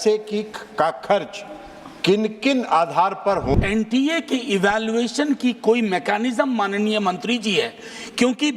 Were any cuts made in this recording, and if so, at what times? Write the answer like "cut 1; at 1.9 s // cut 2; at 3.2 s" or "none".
cut 1; at 3.6 s